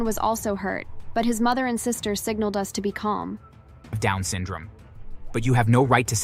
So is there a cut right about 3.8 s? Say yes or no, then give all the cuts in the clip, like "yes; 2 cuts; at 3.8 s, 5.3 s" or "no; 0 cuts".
yes; 1 cut; at 3.8 s